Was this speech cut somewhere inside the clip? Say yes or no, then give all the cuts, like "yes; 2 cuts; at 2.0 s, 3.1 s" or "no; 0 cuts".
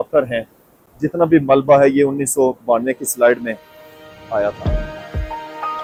no; 0 cuts